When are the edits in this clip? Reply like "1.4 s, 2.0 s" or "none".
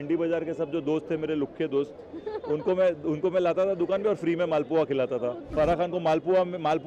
5.4 s